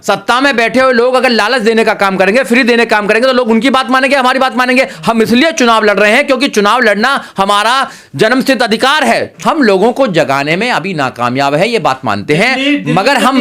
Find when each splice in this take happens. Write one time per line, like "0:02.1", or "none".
0:09.3